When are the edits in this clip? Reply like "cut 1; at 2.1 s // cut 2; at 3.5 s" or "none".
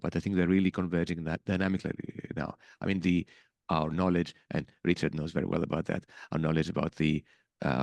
none